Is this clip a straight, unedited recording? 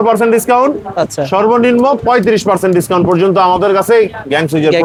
yes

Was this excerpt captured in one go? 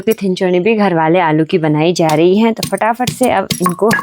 yes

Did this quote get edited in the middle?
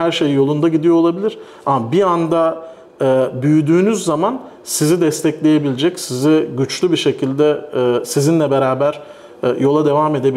no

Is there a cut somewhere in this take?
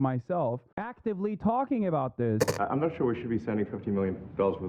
yes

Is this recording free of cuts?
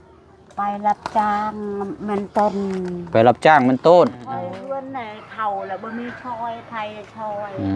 no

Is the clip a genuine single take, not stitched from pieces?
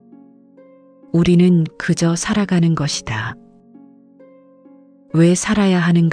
no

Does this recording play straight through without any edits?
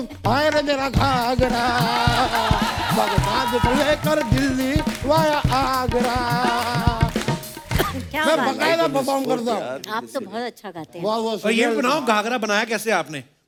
yes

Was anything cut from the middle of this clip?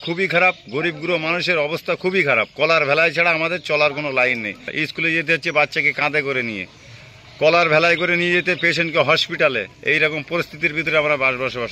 yes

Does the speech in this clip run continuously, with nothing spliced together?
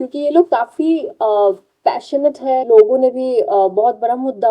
no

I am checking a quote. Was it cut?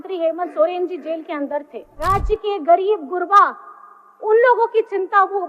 yes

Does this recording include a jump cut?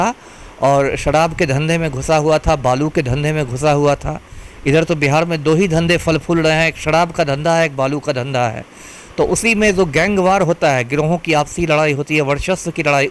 no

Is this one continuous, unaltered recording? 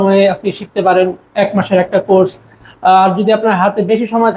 yes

